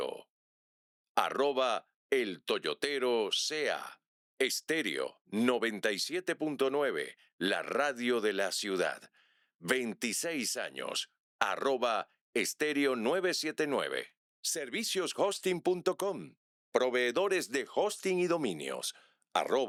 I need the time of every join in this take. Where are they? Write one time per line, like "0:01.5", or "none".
none